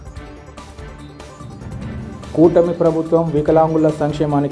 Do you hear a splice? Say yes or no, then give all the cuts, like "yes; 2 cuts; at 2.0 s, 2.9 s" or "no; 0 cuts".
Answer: yes; 1 cut; at 2.0 s